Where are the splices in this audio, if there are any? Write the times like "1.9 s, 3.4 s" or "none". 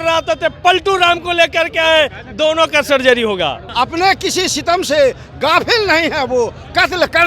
3.6 s